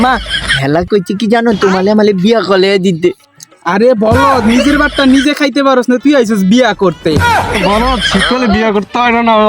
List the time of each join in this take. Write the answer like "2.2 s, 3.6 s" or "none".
7.6 s